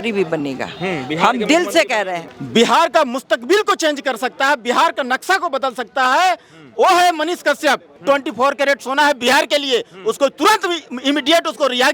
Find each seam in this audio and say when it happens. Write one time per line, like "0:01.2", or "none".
0:02.2
0:07.9